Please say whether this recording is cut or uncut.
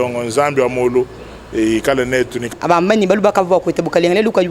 cut